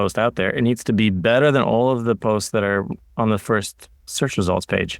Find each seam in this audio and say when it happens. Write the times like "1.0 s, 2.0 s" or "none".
4.1 s